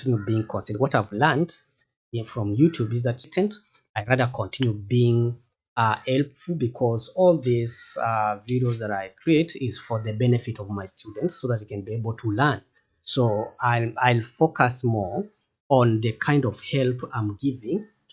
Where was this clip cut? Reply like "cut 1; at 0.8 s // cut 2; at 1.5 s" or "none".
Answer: cut 1; at 3.3 s